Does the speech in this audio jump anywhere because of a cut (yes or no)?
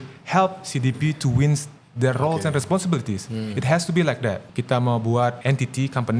yes